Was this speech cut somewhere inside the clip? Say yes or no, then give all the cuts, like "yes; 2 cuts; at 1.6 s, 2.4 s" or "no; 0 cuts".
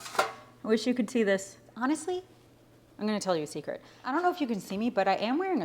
yes; 2 cuts; at 1.7 s, 4.1 s